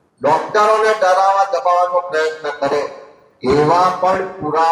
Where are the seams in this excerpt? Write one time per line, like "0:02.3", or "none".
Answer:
none